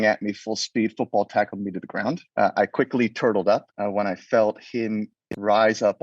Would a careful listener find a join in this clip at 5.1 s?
no; 2 cuts; at 2.2 s, 3.7 s

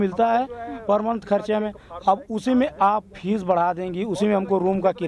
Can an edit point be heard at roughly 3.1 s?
no; 0 cuts

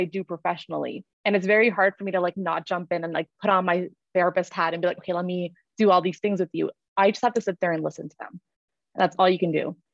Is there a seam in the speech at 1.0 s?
yes; 1 cut; at 1.0 s

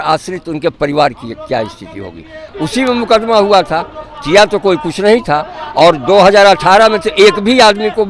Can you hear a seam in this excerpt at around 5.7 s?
no; 1 cut; at 2.4 s

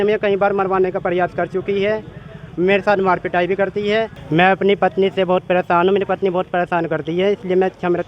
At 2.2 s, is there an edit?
no; 1 cut; at 4.2 s

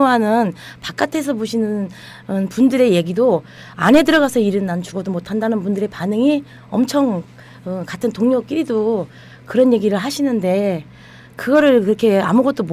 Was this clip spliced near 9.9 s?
no; 0 cuts

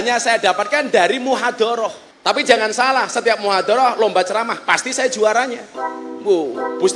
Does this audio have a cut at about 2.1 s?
yes; 1 cut; at 2.1 s

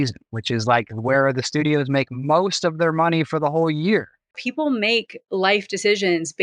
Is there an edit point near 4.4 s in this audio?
yes; 1 cut; at 4.4 s

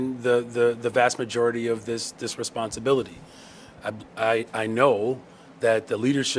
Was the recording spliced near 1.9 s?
no; 1 cut; at 3.7 s

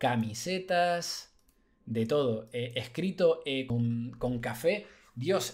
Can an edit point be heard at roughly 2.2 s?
no; 1 cut; at 3.7 s

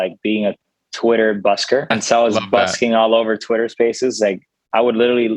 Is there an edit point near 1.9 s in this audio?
yes; 1 cut; at 1.9 s

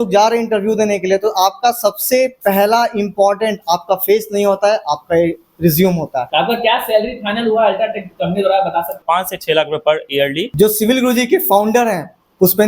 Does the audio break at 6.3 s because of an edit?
yes; 3 cuts; at 6.3 s, 9.0 s, 10.4 s

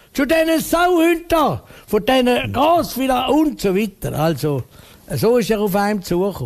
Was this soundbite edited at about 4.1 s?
yes; 1 cut; at 4.1 s

